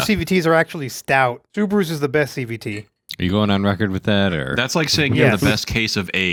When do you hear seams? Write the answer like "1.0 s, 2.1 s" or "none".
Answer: none